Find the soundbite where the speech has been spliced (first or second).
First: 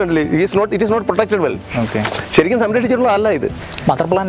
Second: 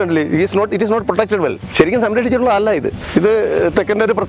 second